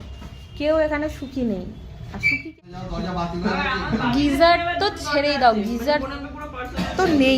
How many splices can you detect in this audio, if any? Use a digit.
1